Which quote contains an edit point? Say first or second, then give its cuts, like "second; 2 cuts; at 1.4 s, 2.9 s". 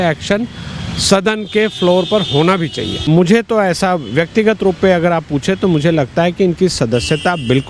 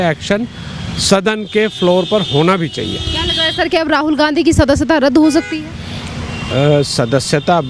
first; 1 cut; at 3.0 s